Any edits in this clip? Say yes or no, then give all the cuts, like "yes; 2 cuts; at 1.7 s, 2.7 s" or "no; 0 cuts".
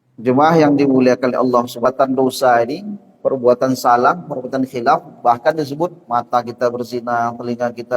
yes; 1 cut; at 1.9 s